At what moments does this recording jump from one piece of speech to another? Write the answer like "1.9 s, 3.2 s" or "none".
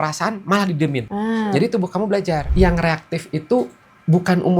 1.1 s, 2.5 s